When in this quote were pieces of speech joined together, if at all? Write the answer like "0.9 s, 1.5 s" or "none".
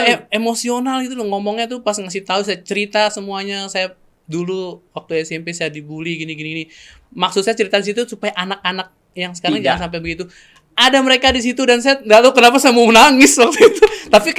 none